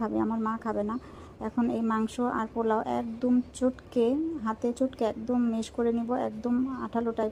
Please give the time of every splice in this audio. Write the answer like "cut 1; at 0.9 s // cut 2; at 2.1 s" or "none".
none